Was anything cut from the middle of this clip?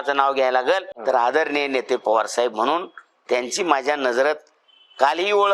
yes; 1 cut; at 0.9 s

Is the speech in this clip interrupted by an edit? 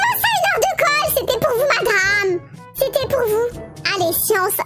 no; 0 cuts

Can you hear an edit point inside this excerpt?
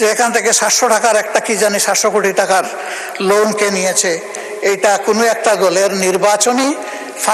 no; 0 cuts

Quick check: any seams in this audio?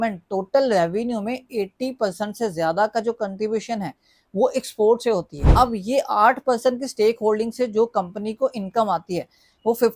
yes; 1 cut; at 5.4 s

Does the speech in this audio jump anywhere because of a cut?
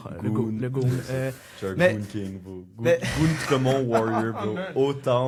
no; 0 cuts

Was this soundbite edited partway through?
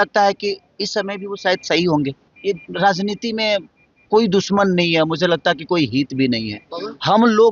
yes; 1 cut; at 2.3 s

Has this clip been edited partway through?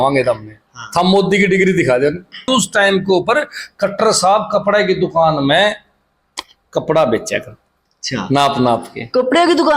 yes; 1 cut; at 2.4 s

